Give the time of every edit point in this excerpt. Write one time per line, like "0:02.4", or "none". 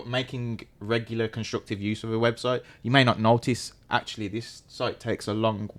none